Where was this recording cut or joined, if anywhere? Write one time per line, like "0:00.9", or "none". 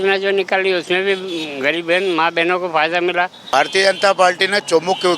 0:03.5